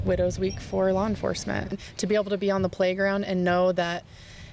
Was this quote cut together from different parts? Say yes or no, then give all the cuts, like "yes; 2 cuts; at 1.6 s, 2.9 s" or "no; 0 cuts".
yes; 1 cut; at 1.7 s